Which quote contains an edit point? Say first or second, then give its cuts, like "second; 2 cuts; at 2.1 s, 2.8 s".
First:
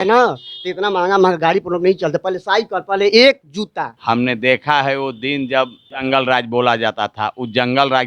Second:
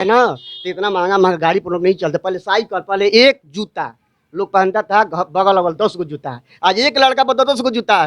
first; 1 cut; at 3.9 s